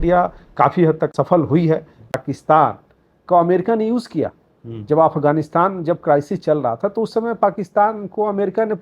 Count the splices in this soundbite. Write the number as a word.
two